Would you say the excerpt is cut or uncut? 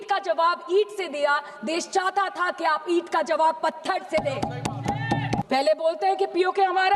cut